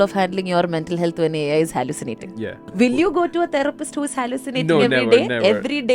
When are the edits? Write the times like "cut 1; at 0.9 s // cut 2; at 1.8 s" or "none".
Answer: cut 1; at 2.6 s